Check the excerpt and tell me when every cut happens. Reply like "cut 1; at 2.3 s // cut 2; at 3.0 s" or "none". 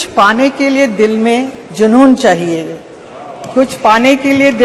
cut 1; at 1.6 s